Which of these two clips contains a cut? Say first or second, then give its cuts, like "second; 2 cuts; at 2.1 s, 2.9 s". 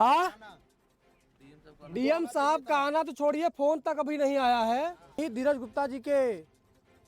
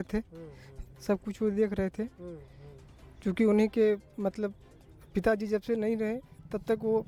first; 1 cut; at 5.2 s